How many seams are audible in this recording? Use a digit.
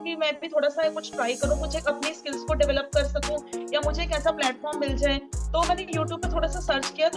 0